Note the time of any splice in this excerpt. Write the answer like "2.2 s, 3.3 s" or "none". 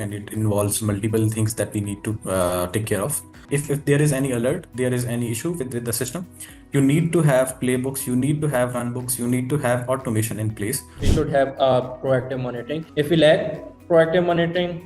3.3 s, 11.0 s, 12.8 s